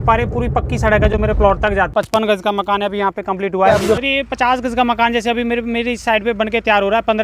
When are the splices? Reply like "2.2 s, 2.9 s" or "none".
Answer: 1.9 s